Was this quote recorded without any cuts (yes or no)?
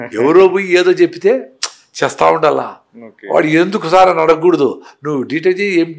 yes